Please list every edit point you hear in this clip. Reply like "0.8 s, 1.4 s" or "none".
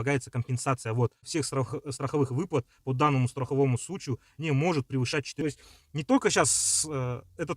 1.3 s, 5.4 s